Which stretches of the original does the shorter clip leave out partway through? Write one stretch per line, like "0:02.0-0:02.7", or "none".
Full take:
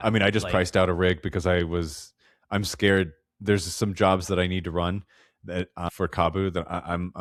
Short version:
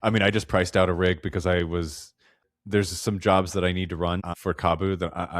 0:02.4-0:03.2
0:05.1-0:05.9